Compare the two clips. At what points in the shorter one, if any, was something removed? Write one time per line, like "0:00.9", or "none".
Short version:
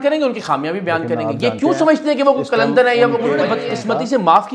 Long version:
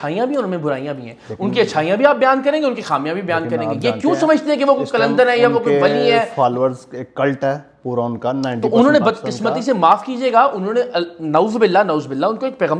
0:03.5